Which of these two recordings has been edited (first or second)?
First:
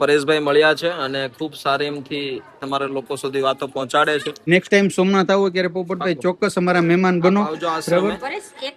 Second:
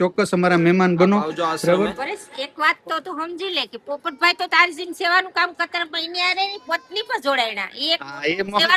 first